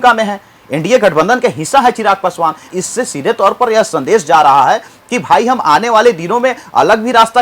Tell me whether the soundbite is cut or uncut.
cut